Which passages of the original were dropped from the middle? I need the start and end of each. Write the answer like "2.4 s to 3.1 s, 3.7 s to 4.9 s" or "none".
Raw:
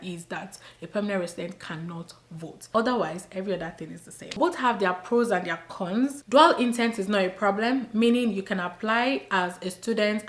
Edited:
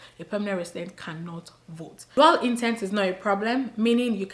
2.6 s to 6.2 s

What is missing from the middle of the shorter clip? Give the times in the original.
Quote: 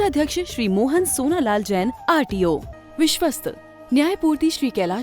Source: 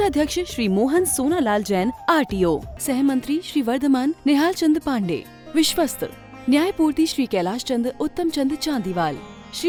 2.7 s to 5.3 s

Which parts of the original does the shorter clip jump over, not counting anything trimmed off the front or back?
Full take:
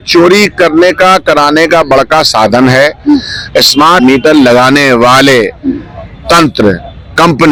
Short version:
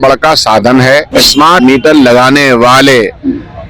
3.0 s to 3.5 s

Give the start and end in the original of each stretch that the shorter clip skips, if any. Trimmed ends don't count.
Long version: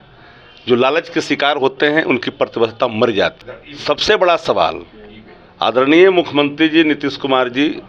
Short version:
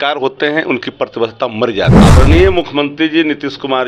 3.4 s to 5.6 s

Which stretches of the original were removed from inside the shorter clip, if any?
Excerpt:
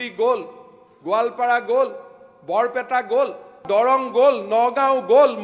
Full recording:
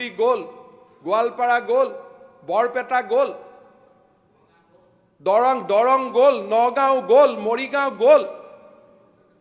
3.6 s to 5.6 s

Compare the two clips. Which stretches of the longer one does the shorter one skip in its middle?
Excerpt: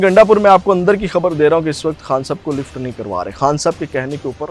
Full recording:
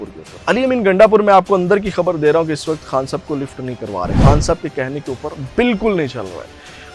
none

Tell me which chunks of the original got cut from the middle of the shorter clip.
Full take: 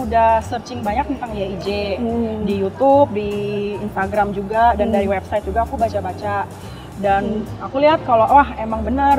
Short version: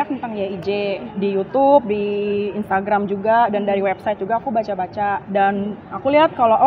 2.0 s to 2.3 s, 6.5 s to 6.9 s

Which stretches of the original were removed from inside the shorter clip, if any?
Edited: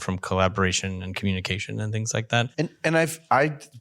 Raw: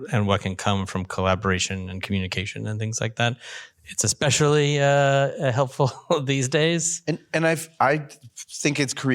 3.4 s to 7.0 s

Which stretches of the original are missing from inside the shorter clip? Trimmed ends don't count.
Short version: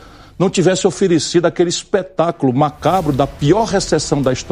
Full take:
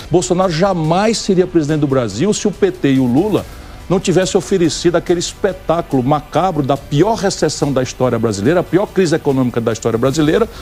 none

